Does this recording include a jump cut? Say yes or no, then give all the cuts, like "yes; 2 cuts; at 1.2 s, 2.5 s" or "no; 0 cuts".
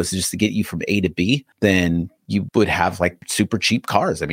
no; 0 cuts